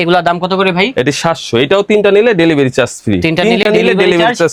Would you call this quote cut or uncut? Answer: uncut